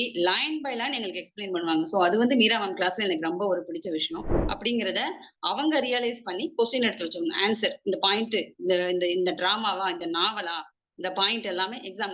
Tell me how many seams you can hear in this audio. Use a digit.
1